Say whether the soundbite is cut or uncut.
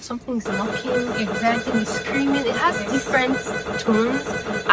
uncut